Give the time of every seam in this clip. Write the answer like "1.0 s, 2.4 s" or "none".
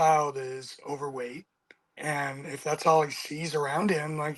none